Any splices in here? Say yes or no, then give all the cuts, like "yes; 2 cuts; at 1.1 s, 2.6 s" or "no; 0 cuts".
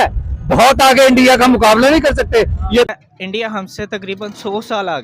yes; 1 cut; at 2.9 s